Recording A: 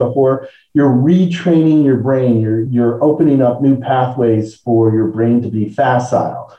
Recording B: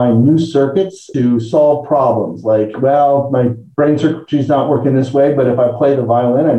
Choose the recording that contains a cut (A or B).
A